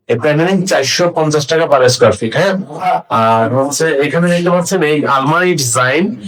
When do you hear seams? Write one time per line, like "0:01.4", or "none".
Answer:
none